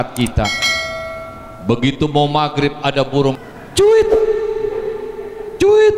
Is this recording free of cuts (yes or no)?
no